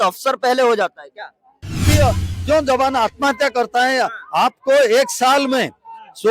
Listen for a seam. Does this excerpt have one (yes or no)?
yes